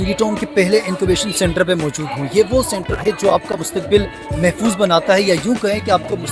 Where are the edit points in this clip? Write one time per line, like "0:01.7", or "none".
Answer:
none